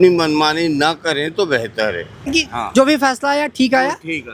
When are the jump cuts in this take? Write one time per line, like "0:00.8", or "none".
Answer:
0:02.3